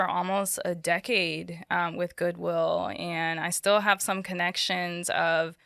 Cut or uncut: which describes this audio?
uncut